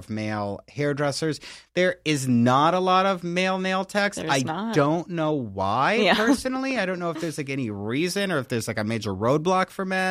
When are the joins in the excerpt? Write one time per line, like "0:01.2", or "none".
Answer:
none